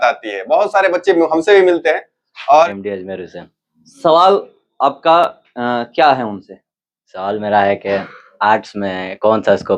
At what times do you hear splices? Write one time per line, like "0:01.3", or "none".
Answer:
0:02.7